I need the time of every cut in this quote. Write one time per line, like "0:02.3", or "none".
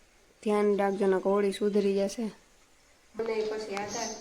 0:03.2